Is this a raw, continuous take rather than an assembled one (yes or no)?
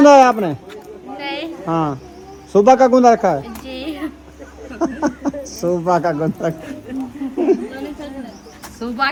yes